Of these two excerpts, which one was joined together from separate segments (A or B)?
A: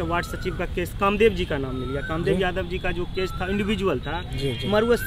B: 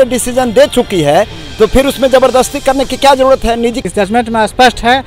B